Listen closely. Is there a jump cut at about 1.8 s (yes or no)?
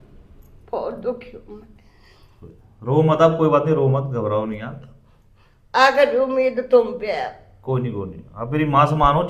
no